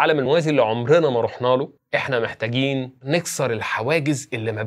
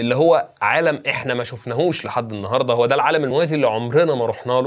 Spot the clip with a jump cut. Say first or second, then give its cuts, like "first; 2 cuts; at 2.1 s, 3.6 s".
first; 1 cut; at 3.0 s